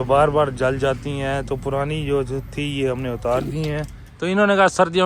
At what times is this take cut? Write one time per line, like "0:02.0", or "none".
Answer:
0:03.8